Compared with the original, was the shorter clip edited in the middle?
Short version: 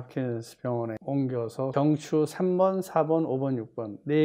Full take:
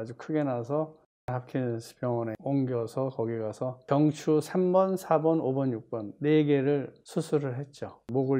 yes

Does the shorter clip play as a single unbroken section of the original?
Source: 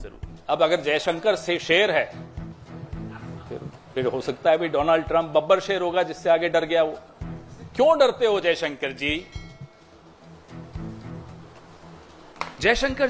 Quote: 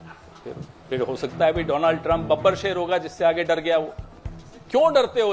yes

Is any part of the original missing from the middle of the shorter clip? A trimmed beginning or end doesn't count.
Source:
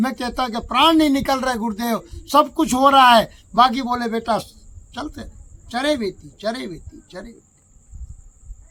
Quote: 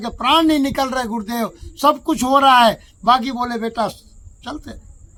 no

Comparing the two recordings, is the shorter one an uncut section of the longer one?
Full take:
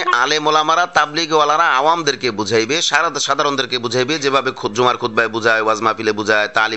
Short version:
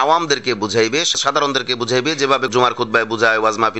no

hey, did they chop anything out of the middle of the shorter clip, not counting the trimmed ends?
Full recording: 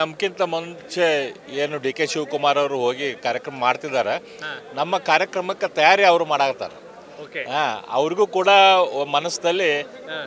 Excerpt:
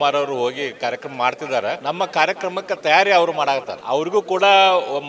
yes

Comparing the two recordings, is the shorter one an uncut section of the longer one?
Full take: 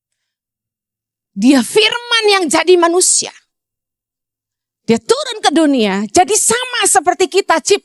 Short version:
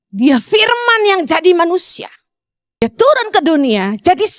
no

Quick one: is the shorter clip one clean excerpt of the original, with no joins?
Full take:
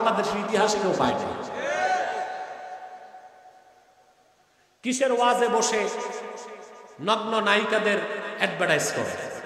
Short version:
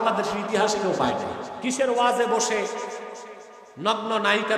no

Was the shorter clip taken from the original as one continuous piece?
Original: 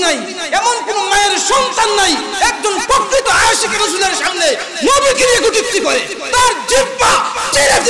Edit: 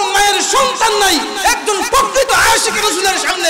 yes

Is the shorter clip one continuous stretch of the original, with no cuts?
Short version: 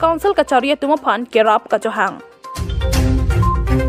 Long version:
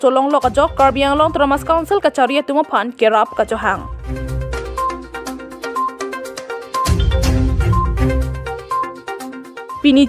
no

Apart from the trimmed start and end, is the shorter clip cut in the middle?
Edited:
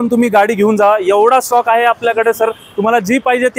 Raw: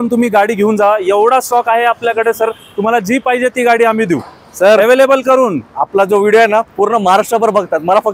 no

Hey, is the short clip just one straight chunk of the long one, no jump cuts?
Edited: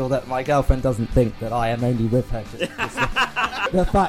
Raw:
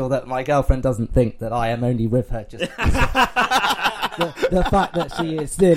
no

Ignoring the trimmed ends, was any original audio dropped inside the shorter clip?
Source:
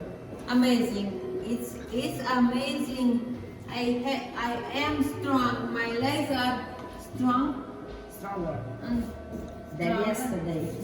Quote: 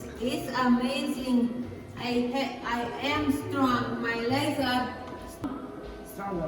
yes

